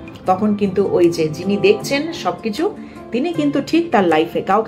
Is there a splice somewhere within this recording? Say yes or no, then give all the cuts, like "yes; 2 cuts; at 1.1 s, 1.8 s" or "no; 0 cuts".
no; 0 cuts